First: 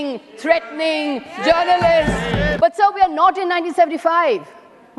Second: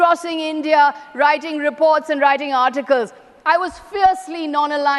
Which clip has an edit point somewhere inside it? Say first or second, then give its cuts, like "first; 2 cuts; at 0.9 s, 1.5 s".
first; 1 cut; at 2.5 s